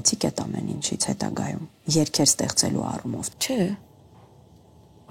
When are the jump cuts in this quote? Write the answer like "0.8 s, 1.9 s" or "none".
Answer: 1.7 s, 3.3 s